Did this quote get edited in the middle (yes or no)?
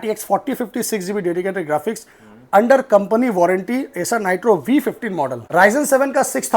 yes